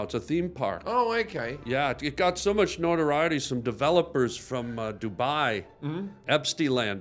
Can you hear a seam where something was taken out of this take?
yes; 1 cut; at 6.1 s

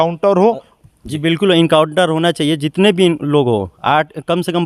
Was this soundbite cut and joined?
no; 0 cuts

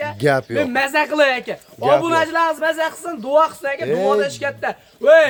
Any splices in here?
no; 0 cuts

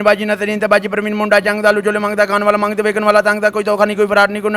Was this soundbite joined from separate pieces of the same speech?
no; 0 cuts

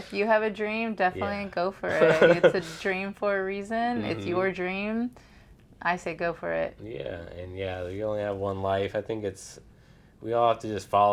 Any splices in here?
no; 0 cuts

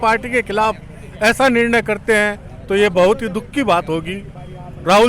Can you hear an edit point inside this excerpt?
no; 0 cuts

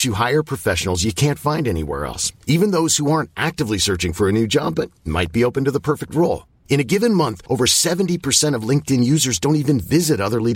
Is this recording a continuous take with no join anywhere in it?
yes; 0 cuts

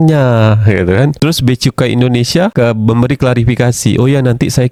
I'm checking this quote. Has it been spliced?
no; 0 cuts

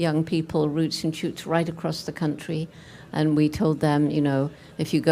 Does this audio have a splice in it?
yes; 1 cut; at 0.9 s

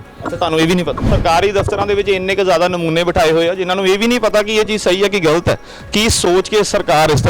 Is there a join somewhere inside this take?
yes; 1 cut; at 1.1 s

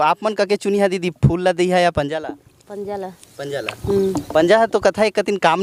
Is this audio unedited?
yes; 0 cuts

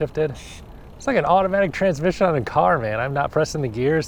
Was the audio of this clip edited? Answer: no; 0 cuts

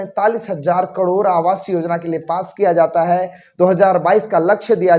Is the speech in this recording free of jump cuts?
yes; 0 cuts

